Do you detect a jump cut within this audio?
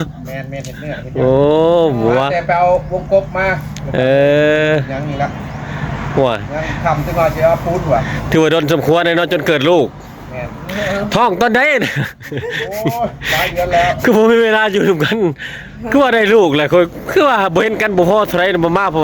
no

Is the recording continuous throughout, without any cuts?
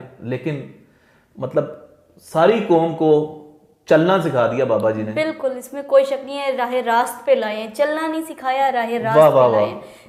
yes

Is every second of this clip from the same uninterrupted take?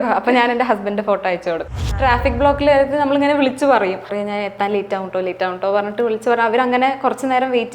no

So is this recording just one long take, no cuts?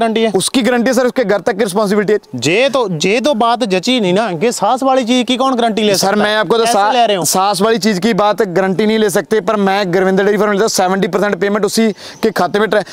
yes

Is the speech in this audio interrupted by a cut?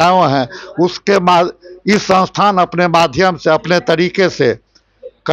no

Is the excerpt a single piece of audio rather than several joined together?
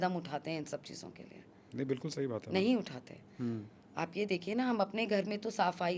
yes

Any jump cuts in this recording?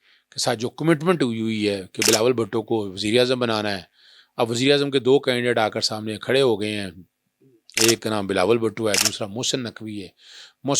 no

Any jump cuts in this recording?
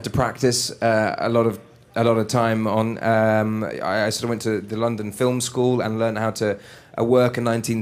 yes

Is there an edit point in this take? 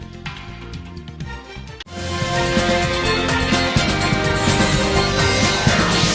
no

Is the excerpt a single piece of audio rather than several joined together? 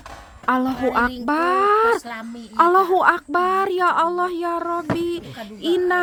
yes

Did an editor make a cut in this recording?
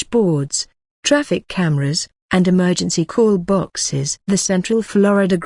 yes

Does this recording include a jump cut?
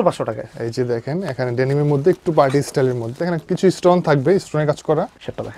no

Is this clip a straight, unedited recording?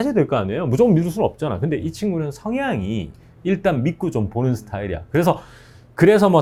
yes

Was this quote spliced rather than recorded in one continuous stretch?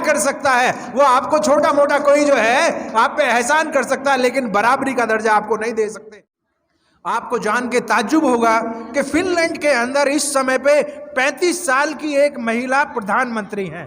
yes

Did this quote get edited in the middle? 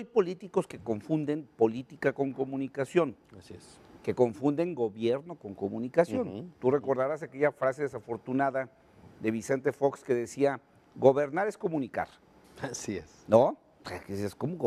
no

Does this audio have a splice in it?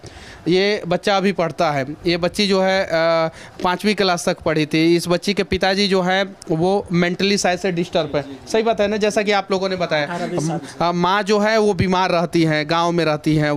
no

